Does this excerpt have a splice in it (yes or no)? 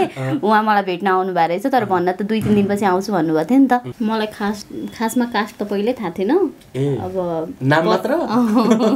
yes